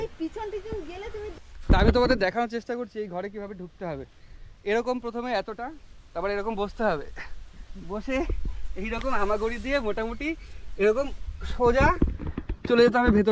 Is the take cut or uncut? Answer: cut